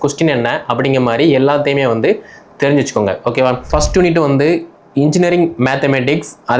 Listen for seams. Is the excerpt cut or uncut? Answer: cut